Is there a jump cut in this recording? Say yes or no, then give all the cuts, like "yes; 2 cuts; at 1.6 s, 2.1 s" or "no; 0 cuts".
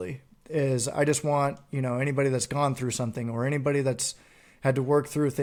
no; 0 cuts